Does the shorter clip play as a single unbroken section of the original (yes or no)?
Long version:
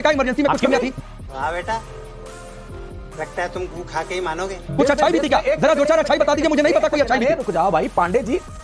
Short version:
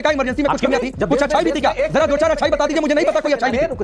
no